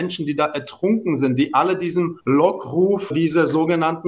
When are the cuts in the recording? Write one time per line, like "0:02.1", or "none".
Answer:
0:02.2
0:03.1